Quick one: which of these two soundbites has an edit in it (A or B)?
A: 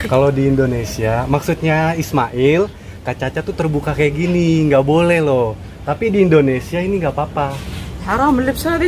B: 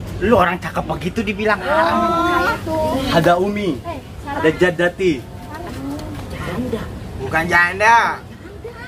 B